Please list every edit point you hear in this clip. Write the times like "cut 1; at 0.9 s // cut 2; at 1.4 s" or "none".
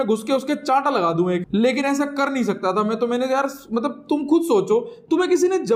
none

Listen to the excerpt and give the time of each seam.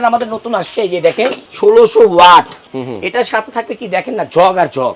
cut 1; at 1.4 s // cut 2; at 2.7 s

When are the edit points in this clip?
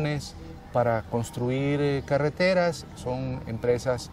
cut 1; at 1.9 s

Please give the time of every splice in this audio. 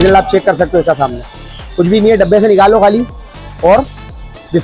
none

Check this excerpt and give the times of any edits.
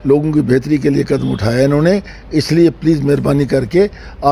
none

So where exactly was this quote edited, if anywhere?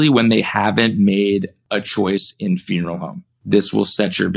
none

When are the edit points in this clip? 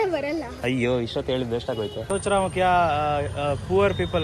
cut 1; at 1.7 s

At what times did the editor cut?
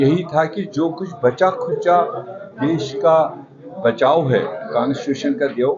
none

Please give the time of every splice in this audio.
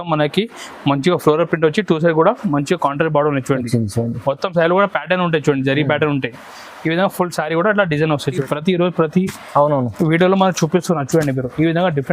cut 1; at 8.3 s

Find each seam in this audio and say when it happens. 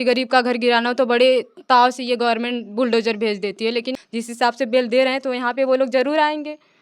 cut 1; at 3.6 s

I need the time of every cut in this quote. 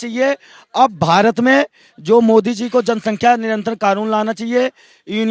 none

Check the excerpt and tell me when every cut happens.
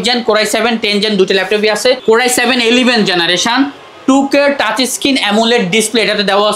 cut 1; at 2.0 s

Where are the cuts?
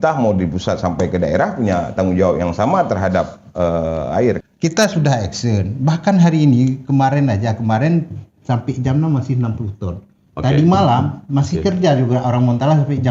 cut 1; at 4.4 s

